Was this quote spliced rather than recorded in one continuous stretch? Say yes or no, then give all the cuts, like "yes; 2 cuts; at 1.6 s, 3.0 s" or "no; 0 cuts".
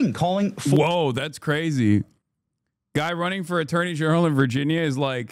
no; 0 cuts